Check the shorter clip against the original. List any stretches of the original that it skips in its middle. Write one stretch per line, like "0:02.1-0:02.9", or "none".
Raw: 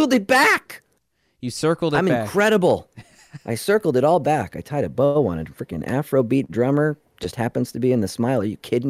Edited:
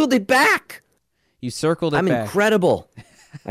none